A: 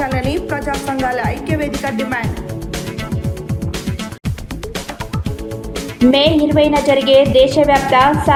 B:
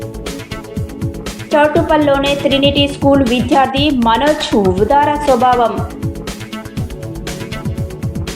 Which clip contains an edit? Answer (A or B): B